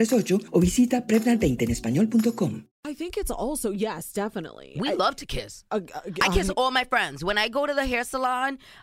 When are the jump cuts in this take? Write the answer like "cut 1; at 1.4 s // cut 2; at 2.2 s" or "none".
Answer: cut 1; at 2.7 s